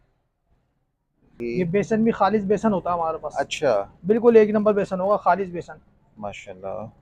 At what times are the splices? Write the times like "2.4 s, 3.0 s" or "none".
1.4 s

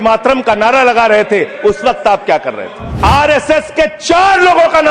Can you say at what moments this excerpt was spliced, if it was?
2.8 s

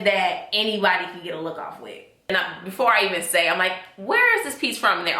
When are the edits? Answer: 2.3 s

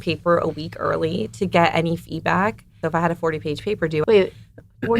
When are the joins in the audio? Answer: 2.8 s, 4.0 s

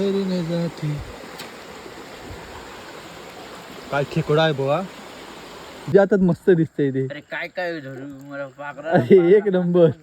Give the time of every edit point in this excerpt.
5.9 s

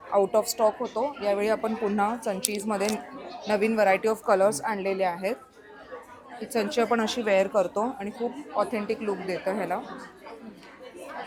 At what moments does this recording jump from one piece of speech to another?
none

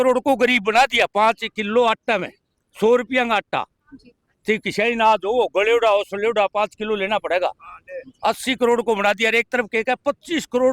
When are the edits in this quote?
none

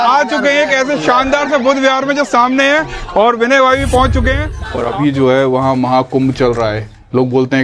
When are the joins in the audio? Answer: 4.5 s

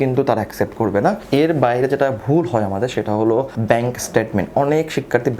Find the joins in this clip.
1.2 s

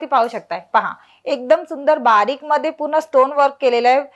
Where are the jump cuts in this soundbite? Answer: none

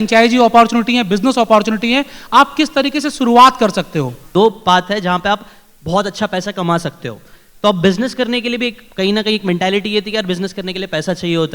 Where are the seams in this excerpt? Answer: 4.2 s

